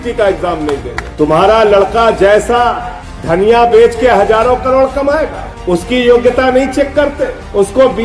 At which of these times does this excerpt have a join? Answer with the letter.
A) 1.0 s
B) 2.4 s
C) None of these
A